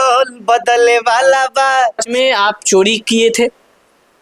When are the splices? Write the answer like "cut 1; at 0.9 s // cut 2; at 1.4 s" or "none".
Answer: cut 1; at 2.1 s